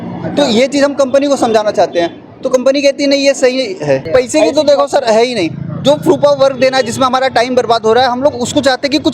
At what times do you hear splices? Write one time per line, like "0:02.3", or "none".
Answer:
0:04.0